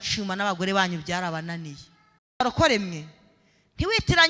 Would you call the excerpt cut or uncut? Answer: cut